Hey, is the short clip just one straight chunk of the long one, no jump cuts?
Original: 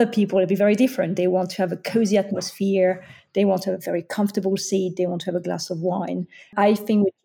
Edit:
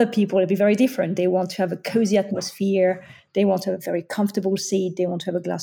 yes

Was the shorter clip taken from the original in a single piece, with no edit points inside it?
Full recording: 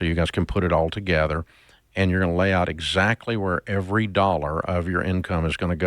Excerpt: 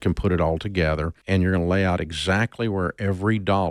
no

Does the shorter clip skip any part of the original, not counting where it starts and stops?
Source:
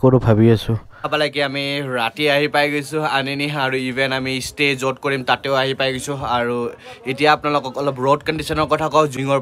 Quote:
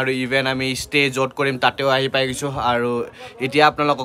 no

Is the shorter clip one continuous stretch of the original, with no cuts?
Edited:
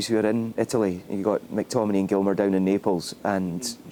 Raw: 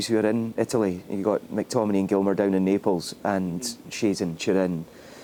yes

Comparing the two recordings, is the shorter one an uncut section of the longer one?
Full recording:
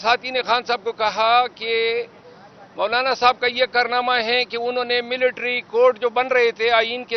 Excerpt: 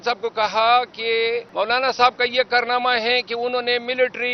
no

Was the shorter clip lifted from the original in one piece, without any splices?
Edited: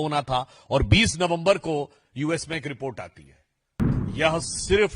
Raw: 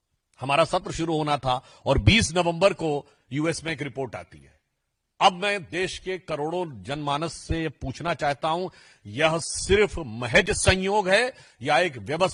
no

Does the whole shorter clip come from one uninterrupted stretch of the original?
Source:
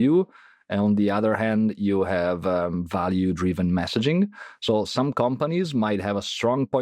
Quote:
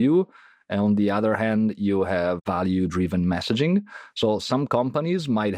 no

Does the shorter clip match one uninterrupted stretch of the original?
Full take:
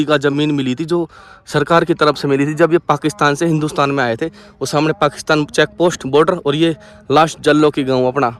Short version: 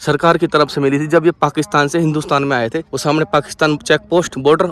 no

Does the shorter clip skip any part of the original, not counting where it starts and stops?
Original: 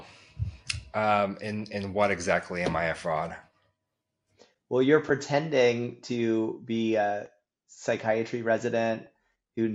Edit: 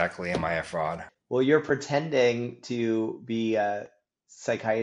yes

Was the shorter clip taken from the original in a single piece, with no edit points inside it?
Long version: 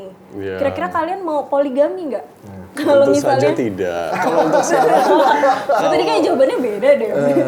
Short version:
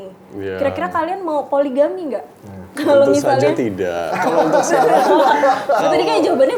yes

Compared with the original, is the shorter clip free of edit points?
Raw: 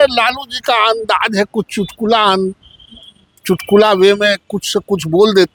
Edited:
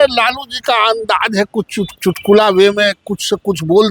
no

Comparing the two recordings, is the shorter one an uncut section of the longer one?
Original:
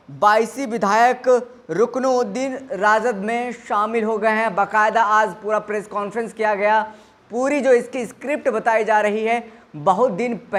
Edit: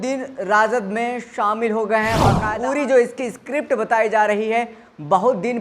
no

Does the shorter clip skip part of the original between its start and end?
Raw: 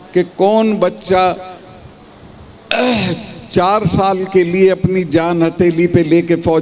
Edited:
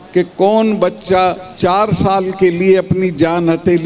yes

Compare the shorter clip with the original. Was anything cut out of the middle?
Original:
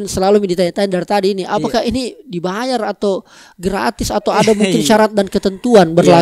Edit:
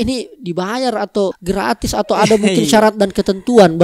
yes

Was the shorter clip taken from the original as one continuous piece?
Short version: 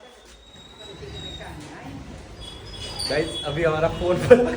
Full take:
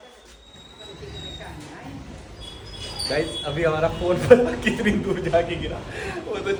yes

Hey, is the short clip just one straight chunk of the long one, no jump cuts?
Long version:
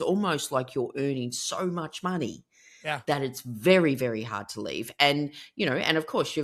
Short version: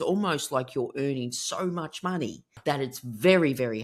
no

